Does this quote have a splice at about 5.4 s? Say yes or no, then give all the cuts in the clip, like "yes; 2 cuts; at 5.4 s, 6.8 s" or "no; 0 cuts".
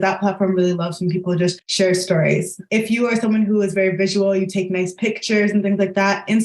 no; 2 cuts; at 1.6 s, 2.6 s